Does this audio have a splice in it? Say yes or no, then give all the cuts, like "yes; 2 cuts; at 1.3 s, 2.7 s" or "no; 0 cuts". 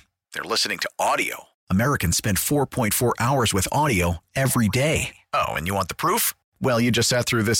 no; 0 cuts